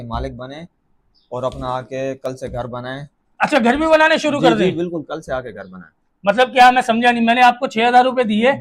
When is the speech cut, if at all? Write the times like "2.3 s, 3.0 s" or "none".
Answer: none